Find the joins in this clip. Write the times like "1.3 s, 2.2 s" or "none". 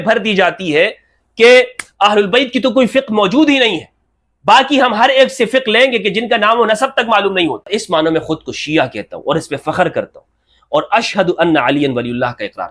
7.7 s